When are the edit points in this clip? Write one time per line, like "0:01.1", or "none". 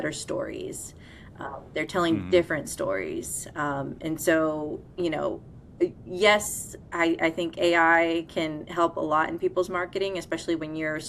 none